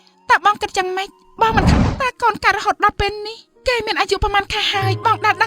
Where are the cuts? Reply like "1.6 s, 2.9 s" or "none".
1.7 s

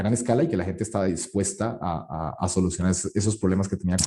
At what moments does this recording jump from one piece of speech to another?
none

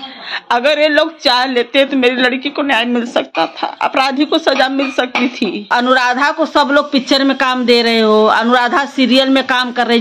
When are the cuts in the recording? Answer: 5.7 s

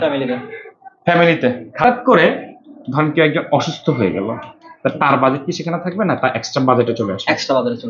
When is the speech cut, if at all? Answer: 1.8 s

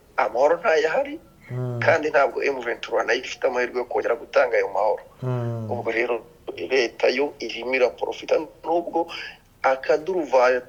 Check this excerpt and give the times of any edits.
none

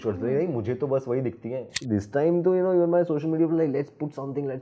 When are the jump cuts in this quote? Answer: 1.7 s

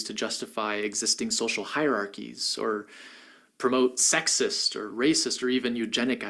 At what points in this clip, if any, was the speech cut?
5.4 s

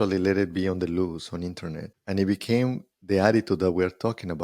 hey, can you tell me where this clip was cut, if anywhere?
1.9 s

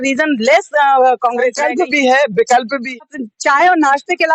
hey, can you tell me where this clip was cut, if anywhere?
1.6 s, 3.0 s

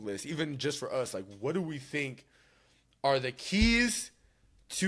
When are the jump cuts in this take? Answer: none

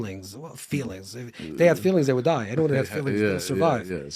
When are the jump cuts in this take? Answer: none

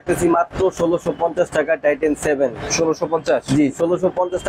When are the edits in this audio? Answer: none

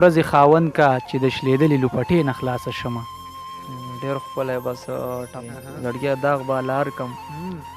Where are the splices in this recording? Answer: 5.4 s

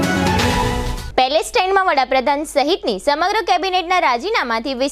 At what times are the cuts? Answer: 1.0 s

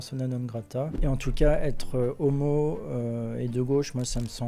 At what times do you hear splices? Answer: 0.9 s

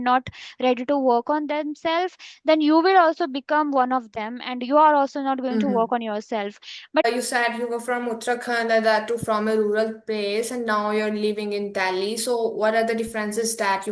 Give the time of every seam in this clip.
7.0 s

